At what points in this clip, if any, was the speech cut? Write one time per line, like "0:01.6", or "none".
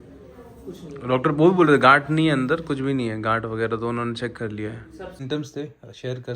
0:05.2

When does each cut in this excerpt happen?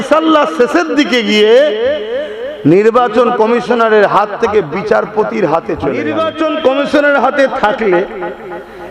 0:06.1

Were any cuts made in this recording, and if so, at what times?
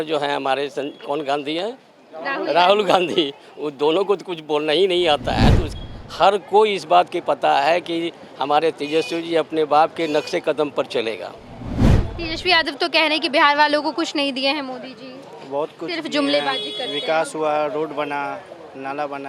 0:05.7
0:11.9

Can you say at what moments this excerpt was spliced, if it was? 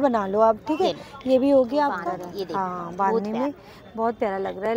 none

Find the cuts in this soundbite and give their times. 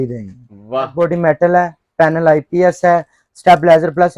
0:00.9

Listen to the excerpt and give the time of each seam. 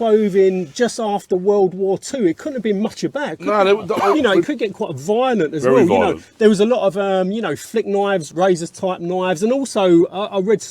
0:04.1
0:08.3

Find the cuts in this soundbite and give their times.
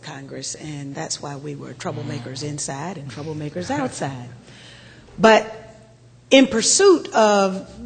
0:06.5

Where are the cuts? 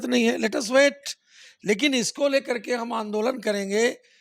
none

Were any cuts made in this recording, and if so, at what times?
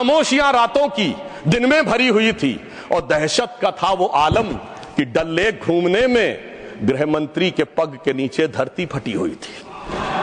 none

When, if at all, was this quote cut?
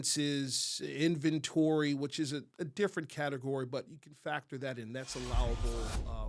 none

